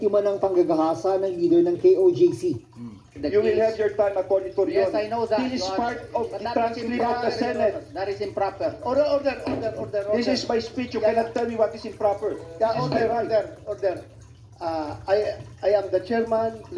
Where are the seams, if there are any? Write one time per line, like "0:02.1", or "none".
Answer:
none